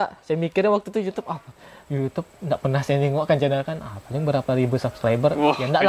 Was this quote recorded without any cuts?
yes; 0 cuts

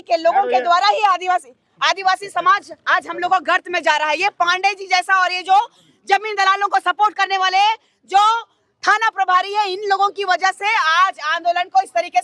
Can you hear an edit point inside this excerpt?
no; 0 cuts

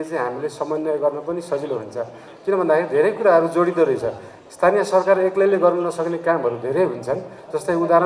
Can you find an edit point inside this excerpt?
no; 0 cuts

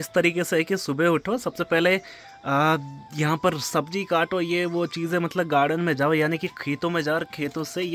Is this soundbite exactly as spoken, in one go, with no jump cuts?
yes; 0 cuts

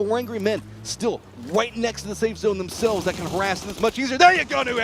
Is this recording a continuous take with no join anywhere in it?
yes; 0 cuts

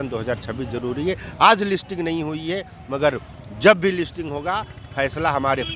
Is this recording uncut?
yes; 0 cuts

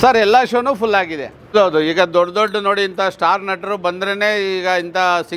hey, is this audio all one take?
no; 1 cut; at 1.5 s

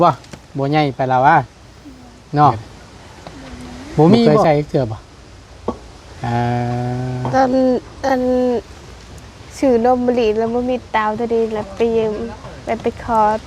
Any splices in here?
yes; 1 cut; at 4.4 s

